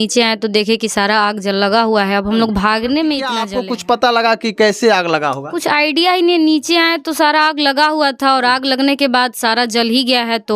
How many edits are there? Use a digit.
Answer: 1